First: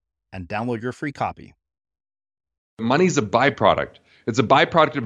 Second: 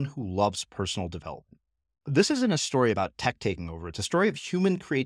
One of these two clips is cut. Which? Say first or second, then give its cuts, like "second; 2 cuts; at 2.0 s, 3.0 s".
first; 1 cut; at 2.8 s